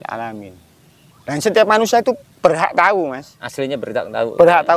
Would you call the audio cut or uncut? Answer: cut